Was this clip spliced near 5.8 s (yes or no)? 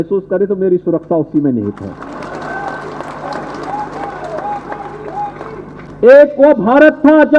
yes